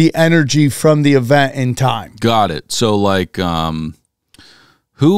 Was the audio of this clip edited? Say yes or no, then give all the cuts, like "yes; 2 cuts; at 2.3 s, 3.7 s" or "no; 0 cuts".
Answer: no; 0 cuts